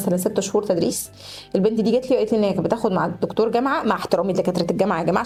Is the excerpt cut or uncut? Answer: uncut